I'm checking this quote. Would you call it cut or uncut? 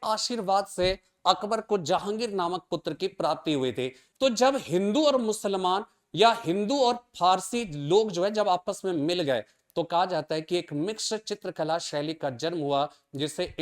cut